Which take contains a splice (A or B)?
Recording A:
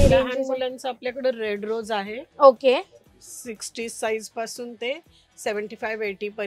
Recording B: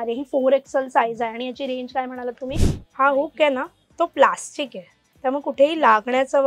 B